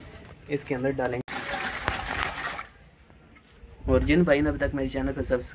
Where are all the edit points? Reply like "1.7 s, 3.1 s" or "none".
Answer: 1.2 s